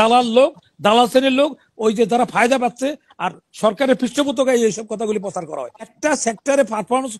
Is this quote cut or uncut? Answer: cut